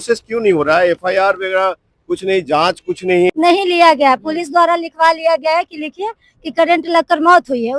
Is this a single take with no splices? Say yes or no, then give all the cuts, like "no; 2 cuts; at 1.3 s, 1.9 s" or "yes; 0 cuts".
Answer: no; 1 cut; at 3.3 s